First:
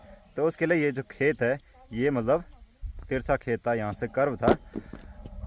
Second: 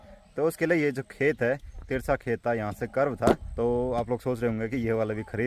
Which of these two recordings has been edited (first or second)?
second